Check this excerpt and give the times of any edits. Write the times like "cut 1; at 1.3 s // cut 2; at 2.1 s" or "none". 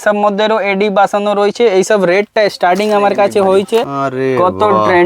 cut 1; at 4.0 s